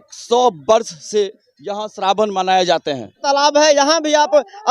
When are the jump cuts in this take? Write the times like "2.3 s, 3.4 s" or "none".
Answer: 3.2 s